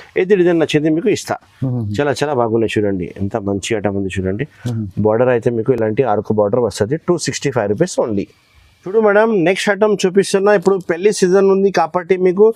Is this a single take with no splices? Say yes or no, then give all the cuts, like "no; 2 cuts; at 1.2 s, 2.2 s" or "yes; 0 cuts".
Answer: yes; 0 cuts